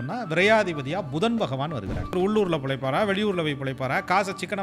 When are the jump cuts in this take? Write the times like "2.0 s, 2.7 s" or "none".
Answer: 2.1 s